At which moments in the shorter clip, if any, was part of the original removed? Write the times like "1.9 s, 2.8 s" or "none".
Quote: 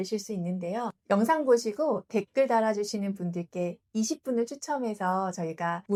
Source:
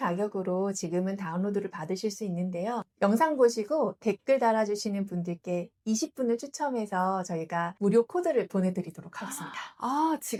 none